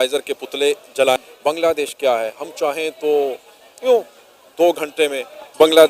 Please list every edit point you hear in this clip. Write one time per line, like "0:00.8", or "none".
0:01.2